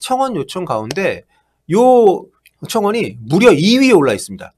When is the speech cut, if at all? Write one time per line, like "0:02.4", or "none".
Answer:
none